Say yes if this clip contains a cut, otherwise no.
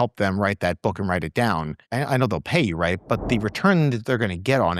yes